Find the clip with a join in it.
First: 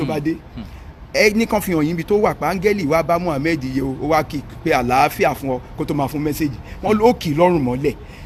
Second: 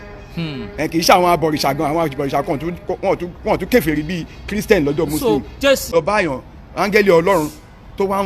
second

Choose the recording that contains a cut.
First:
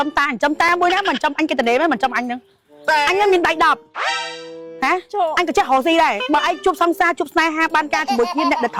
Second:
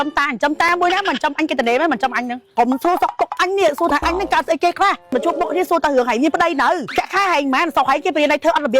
second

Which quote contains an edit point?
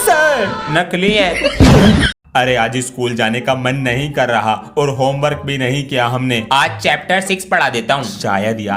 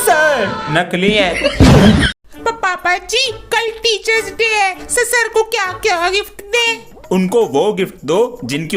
first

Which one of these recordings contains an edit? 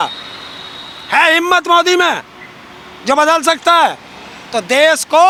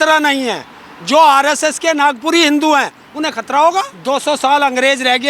second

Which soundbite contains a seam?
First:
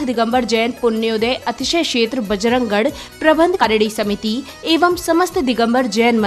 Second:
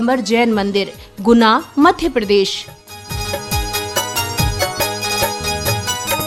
first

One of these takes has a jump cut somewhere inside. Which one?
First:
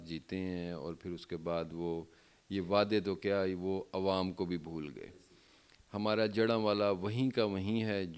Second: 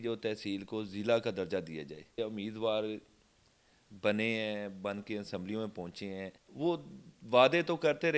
second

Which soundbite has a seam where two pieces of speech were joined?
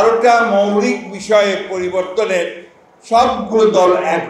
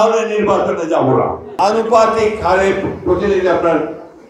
second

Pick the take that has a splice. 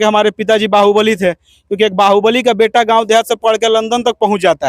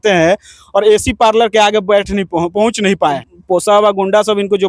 second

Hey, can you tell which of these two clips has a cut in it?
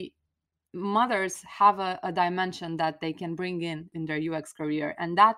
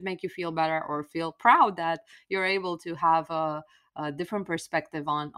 first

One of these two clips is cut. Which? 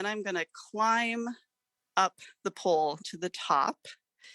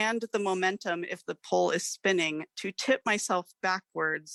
first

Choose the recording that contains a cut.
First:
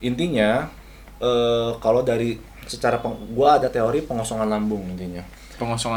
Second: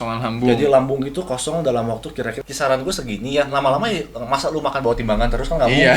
second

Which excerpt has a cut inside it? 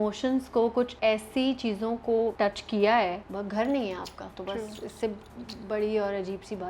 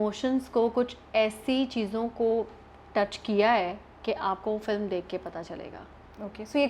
first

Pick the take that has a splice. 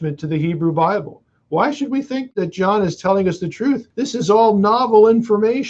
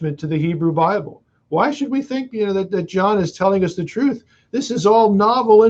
first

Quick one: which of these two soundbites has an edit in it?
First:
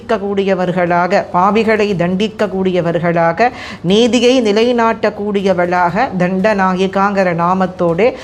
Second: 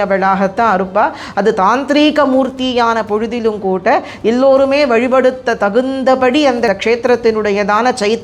second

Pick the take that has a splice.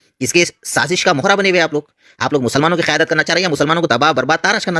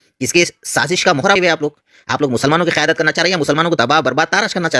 second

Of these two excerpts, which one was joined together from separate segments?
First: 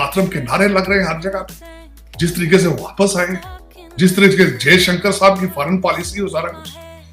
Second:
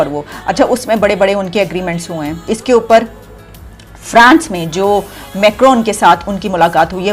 second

